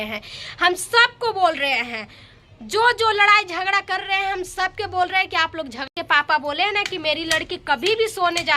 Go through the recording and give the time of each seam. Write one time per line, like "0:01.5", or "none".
0:05.9